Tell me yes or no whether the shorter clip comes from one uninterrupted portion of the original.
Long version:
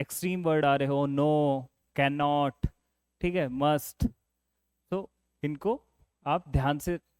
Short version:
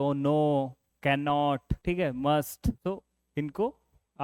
no